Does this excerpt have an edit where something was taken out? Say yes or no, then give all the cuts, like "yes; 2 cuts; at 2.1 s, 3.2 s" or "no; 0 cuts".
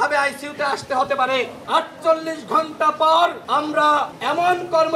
yes; 2 cuts; at 1.6 s, 3.8 s